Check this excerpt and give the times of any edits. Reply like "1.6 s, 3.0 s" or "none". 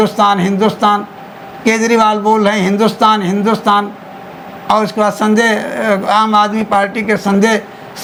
none